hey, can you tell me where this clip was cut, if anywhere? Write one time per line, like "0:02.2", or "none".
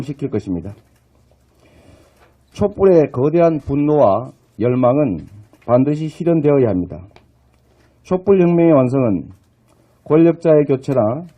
0:04.3